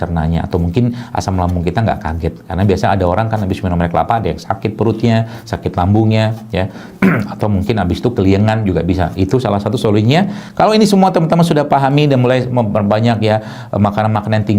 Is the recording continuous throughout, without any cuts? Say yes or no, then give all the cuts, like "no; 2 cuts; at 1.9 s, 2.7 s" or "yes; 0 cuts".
no; 1 cut; at 10.4 s